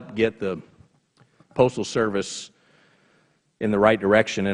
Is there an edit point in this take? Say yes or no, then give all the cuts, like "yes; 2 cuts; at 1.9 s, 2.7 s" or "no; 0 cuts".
no; 0 cuts